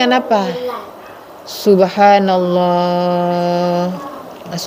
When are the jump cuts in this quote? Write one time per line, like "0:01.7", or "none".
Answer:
none